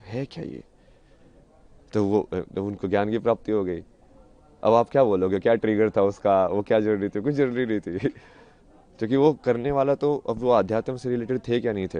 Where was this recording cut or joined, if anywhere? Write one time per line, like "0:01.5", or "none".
none